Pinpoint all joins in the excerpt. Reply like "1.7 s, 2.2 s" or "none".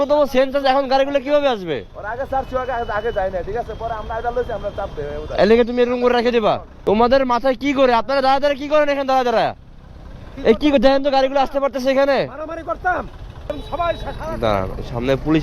6.7 s, 13.5 s